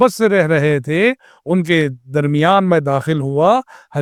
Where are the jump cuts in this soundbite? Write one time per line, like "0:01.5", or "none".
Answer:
none

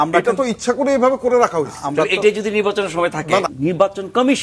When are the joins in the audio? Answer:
0:03.5

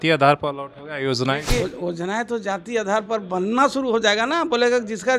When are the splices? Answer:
0:01.6

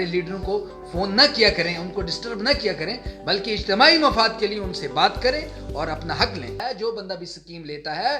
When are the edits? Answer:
0:06.6

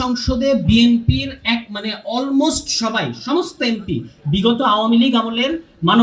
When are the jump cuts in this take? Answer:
none

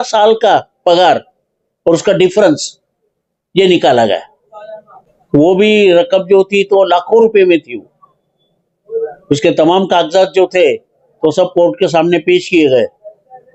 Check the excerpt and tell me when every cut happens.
none

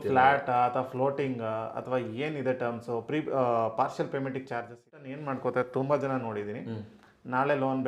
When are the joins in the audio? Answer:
0:05.0

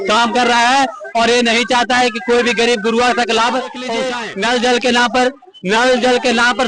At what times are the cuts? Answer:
0:04.0

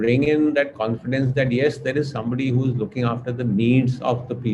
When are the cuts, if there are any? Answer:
none

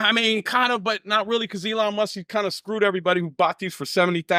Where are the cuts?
none

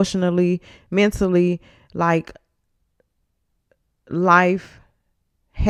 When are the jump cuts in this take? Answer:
none

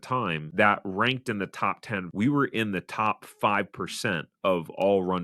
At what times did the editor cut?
0:02.1

